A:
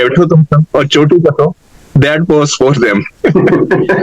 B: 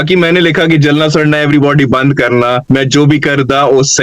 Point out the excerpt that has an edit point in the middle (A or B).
B